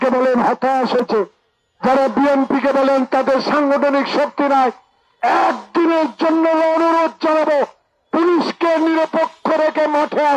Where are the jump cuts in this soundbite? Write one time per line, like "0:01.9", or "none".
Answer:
0:01.0